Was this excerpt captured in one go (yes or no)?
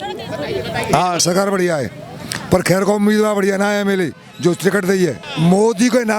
no